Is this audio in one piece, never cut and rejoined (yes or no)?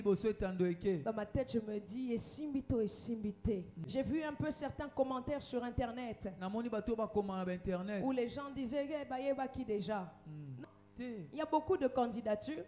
no